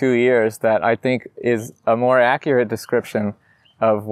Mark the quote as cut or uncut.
uncut